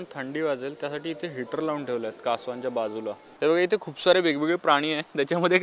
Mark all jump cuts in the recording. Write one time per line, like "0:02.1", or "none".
0:03.3